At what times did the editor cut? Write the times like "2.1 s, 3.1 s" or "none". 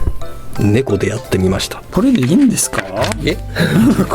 1.8 s